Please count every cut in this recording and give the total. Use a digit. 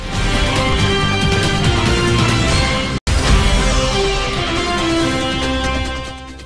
0